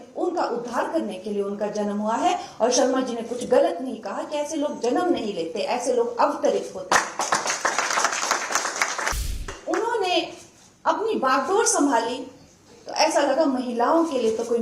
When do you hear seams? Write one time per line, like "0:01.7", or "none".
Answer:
0:09.5